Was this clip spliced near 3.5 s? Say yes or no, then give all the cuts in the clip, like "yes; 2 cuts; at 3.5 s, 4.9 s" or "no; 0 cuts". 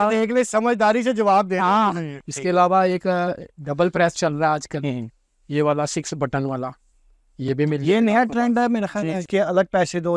no; 2 cuts; at 2.1 s, 9.2 s